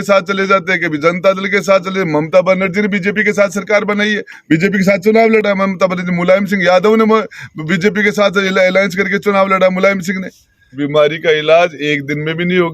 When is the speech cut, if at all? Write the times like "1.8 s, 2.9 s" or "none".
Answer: 10.7 s